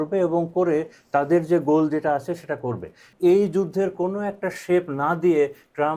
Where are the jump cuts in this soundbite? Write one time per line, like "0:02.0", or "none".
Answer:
0:03.1